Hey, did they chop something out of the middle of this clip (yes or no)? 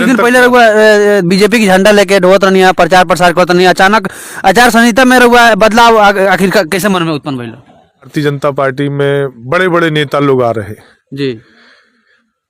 no